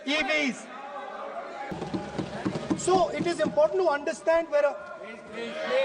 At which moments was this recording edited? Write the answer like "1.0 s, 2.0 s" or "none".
1.7 s